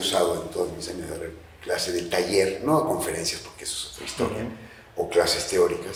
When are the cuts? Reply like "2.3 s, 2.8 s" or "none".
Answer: none